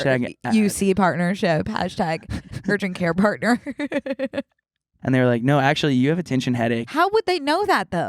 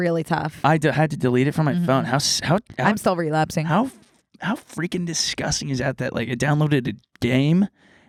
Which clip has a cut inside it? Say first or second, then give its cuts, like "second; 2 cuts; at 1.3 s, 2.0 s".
first; 1 cut; at 4.9 s